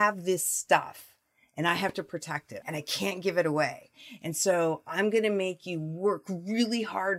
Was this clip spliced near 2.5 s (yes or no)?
yes